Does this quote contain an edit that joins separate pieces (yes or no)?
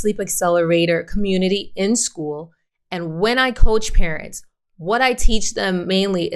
no